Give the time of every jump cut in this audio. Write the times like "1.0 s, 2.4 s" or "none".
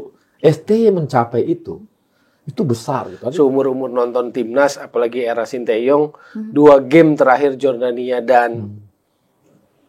3.1 s